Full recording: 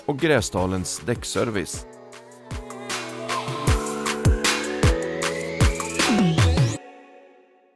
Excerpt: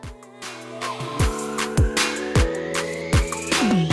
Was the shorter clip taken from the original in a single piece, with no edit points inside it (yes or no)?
yes